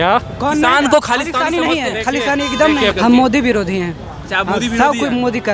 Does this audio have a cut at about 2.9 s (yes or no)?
yes